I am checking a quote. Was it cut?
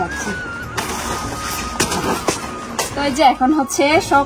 yes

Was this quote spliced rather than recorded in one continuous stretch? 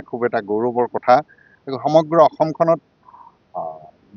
no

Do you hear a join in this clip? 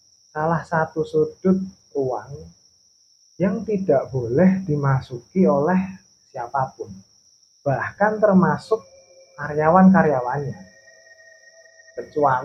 no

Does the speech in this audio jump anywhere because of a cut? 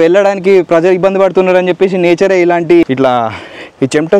yes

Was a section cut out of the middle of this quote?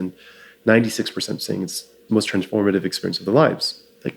no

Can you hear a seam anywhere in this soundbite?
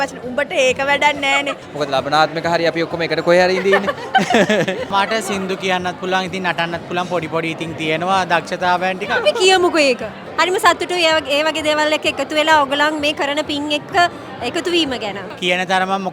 yes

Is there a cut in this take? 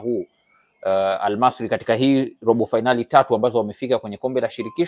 no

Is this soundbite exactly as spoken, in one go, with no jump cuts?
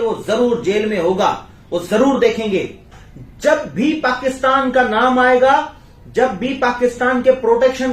no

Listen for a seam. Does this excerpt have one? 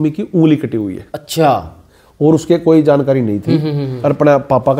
no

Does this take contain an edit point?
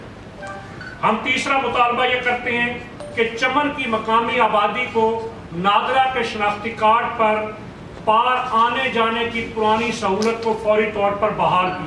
no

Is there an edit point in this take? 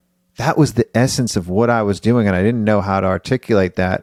no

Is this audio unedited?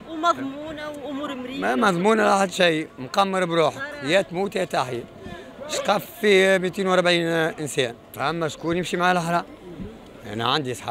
no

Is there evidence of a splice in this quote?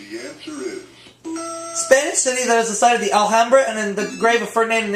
yes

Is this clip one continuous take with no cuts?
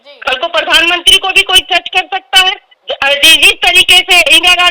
yes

